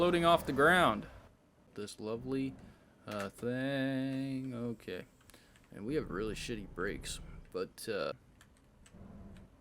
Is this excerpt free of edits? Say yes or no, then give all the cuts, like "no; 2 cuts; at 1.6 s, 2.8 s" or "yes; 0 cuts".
no; 2 cuts; at 1.7 s, 8.1 s